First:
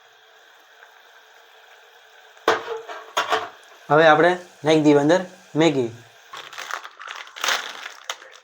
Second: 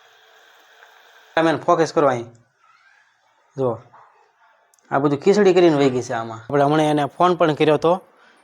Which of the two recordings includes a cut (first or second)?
second